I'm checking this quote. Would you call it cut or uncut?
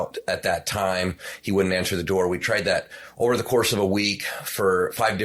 uncut